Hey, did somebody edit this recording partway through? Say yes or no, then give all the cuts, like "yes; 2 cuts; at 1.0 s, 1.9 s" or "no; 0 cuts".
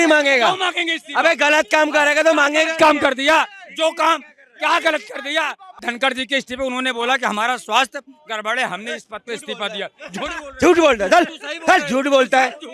yes; 1 cut; at 5.7 s